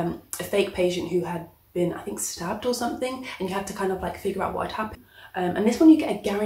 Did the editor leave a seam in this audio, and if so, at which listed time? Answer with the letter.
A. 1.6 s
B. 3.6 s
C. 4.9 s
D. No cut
C